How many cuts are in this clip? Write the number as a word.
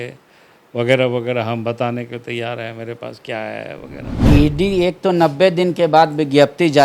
one